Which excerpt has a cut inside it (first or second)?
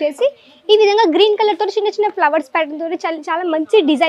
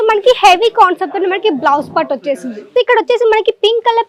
second